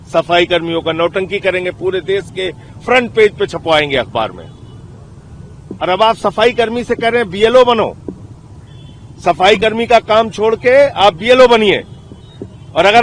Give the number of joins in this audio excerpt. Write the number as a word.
zero